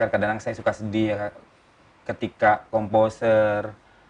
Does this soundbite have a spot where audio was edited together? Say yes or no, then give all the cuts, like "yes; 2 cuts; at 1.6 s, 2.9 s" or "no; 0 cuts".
no; 0 cuts